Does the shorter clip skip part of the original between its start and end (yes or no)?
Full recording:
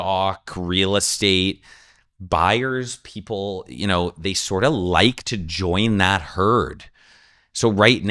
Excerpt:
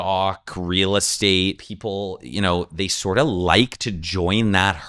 yes